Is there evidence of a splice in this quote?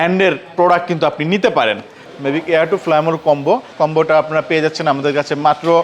yes; 2 cuts; at 2.1 s, 3.7 s

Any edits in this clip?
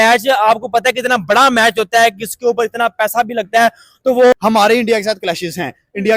yes; 1 cut; at 4.3 s

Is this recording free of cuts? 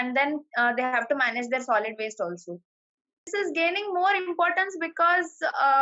no; 1 cut; at 3.3 s

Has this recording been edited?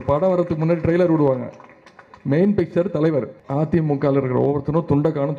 yes; 1 cut; at 3.4 s

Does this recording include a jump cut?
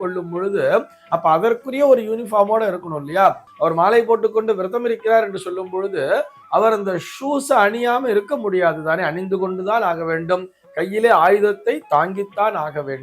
yes; 1 cut; at 3.5 s

